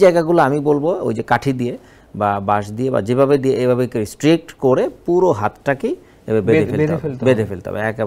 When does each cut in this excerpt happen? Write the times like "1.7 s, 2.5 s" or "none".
none